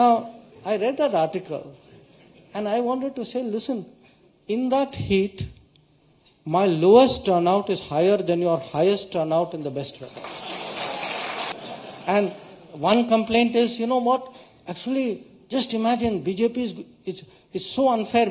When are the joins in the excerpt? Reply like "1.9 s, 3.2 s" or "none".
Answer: 11.5 s